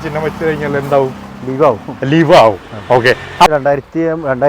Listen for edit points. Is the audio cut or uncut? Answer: cut